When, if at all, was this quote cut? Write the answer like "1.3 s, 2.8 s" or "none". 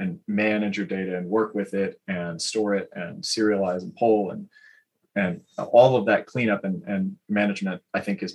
none